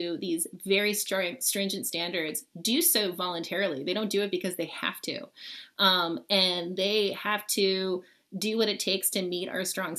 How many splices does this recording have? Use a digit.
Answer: 0